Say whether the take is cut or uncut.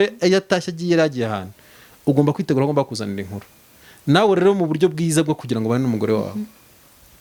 uncut